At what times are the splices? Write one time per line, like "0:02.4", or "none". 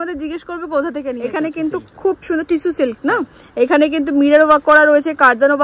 0:01.2